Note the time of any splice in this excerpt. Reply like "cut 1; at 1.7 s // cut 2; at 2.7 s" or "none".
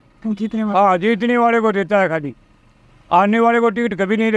none